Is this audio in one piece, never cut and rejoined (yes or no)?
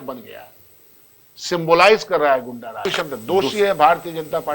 no